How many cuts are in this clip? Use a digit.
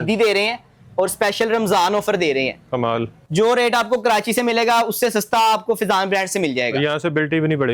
1